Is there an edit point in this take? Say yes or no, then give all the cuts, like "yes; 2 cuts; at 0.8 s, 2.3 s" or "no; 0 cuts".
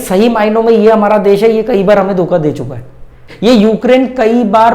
yes; 1 cut; at 3.2 s